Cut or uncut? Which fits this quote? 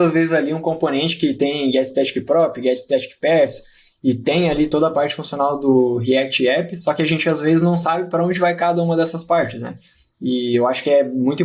uncut